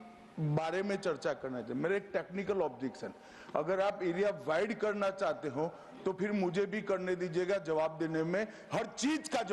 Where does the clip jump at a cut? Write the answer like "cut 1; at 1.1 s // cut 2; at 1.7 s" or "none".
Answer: none